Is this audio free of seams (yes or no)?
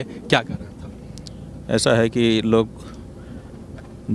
yes